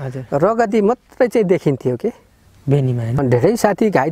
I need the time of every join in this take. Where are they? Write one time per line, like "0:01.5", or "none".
0:03.2